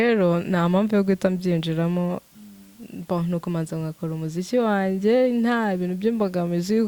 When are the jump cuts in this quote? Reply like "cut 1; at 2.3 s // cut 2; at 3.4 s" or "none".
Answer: none